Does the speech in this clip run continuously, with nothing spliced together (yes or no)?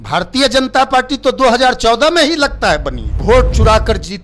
no